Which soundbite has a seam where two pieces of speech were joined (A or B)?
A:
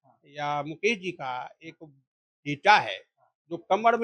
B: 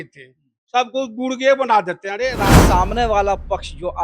B